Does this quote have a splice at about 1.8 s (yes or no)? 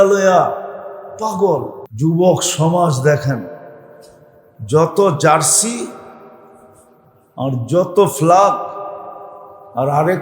yes